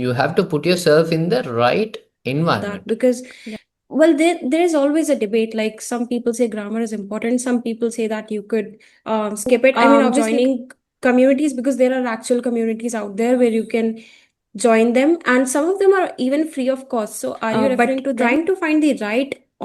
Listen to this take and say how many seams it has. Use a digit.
4